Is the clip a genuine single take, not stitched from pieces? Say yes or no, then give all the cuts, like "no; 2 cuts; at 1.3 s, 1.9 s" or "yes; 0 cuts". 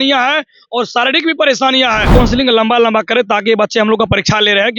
no; 1 cut; at 2.1 s